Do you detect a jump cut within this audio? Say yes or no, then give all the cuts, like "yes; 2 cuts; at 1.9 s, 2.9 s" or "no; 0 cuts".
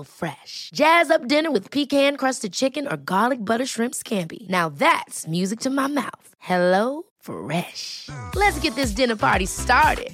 no; 0 cuts